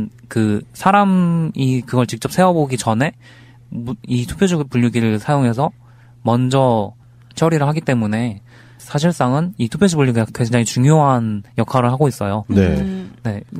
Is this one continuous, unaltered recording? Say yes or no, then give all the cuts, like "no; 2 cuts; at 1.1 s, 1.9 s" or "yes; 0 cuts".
no; 1 cut; at 7.3 s